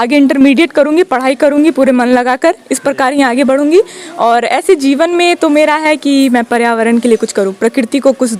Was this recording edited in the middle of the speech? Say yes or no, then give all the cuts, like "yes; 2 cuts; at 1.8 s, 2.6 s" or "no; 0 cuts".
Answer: no; 0 cuts